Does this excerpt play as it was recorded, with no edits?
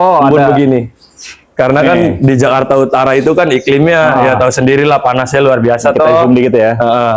yes; 0 cuts

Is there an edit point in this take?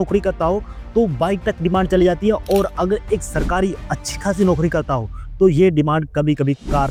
no; 0 cuts

